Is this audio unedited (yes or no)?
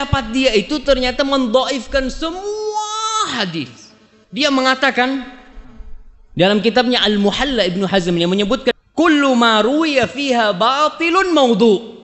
no